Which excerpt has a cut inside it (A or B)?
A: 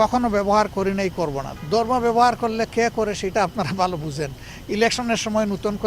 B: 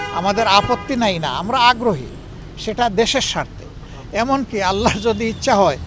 A